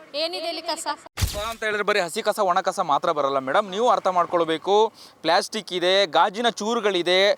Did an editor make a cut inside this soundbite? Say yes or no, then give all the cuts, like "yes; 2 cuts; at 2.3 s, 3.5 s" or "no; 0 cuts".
yes; 1 cut; at 1.2 s